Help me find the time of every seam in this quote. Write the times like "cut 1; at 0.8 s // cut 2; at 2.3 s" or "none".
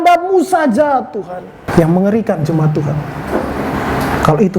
cut 1; at 1.6 s